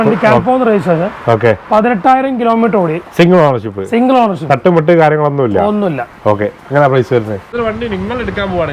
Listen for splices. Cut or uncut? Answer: cut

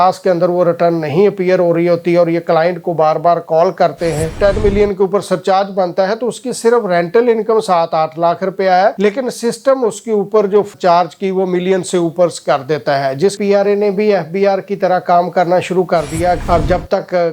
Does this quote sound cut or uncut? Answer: cut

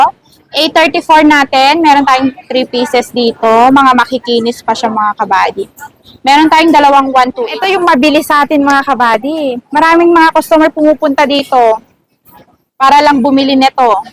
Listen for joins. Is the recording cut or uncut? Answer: cut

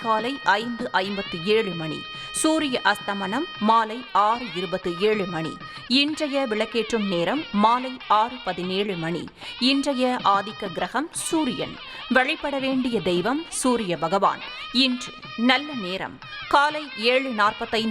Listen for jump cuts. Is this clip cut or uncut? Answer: cut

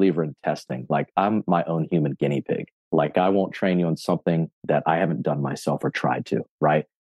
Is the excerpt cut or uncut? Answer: cut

